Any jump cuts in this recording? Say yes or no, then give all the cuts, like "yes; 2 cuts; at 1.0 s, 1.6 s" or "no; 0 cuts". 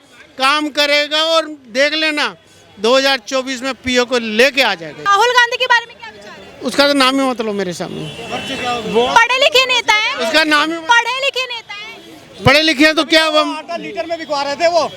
yes; 1 cut; at 4.9 s